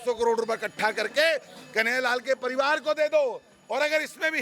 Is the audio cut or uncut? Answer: uncut